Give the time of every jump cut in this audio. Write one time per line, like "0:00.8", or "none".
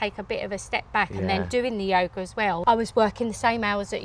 0:02.6